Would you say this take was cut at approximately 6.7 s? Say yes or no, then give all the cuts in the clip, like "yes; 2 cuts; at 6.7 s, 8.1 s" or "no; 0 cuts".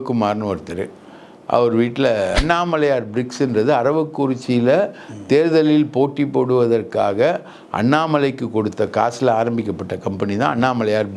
no; 1 cut; at 2.4 s